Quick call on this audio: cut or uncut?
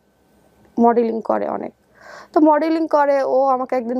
uncut